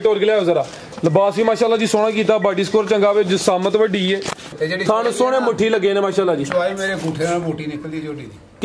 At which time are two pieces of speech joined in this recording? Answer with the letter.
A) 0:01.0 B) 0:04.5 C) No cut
B